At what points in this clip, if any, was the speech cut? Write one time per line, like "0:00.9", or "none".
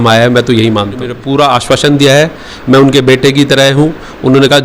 0:01.2